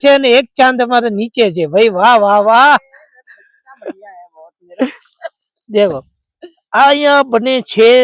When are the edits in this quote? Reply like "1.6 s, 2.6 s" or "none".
none